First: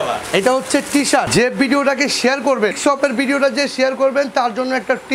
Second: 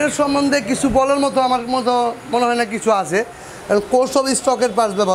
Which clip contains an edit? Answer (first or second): first